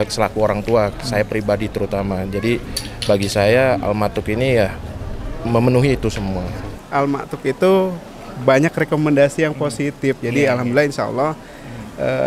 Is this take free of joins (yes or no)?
no